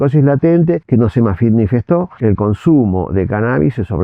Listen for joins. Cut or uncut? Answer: cut